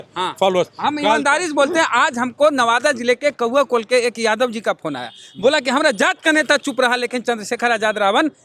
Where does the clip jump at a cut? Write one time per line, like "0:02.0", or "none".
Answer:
none